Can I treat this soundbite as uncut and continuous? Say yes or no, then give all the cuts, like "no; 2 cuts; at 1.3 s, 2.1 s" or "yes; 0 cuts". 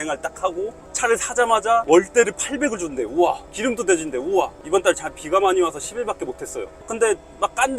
no; 2 cuts; at 4.6 s, 6.9 s